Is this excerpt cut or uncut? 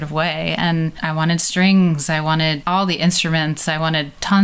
cut